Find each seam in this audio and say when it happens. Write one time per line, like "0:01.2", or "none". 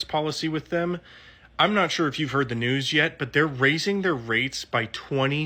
none